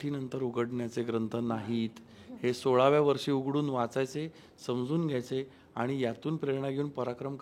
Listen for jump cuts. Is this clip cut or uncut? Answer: uncut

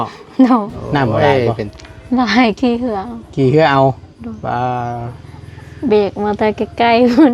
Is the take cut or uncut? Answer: cut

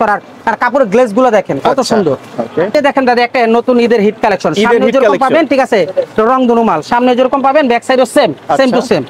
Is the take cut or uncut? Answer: uncut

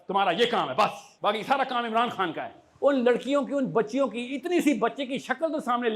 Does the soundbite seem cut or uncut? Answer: cut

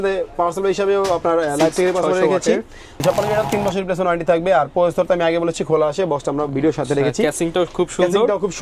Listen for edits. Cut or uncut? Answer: cut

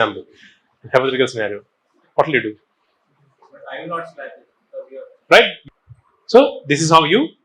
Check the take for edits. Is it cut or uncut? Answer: cut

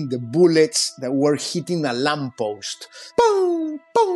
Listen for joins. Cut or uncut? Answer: cut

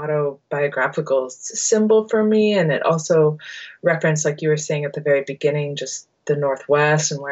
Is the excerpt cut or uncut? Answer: uncut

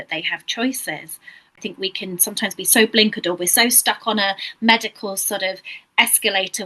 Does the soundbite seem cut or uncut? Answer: cut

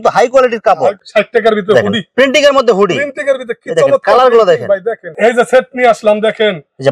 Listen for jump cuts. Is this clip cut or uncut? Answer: cut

